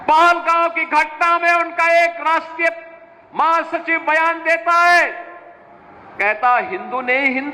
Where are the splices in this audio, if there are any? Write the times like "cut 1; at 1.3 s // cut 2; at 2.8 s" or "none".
none